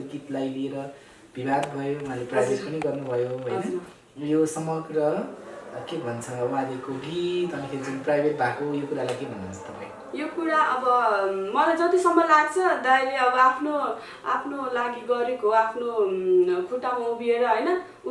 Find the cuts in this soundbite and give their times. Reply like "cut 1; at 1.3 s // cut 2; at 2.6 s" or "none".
none

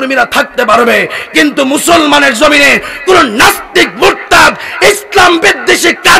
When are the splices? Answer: none

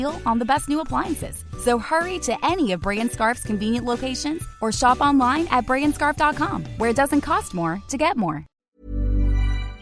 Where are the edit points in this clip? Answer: cut 1; at 8.5 s

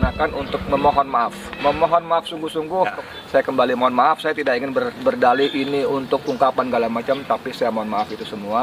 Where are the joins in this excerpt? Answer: cut 1; at 3.0 s

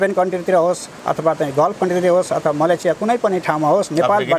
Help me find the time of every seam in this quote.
none

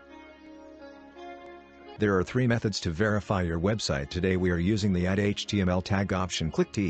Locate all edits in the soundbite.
cut 1; at 1.8 s

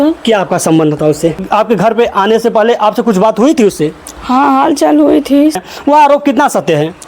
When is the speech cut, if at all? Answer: cut 1; at 1.4 s // cut 2; at 5.7 s

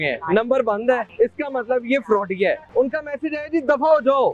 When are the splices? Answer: cut 1; at 1.1 s // cut 2; at 2.6 s

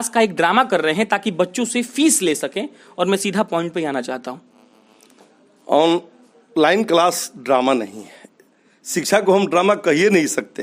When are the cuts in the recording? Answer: none

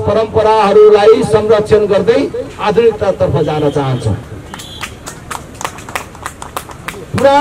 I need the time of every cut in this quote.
none

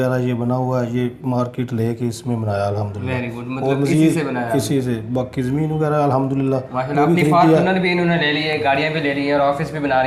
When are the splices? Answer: none

